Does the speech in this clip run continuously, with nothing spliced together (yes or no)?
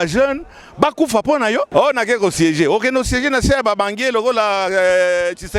no